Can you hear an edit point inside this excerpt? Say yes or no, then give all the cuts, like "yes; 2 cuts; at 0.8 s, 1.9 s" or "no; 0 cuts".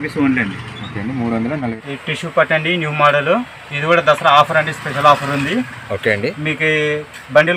yes; 1 cut; at 1.7 s